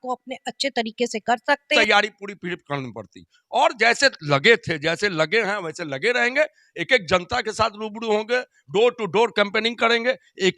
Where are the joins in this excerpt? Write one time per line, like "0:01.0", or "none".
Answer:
0:01.7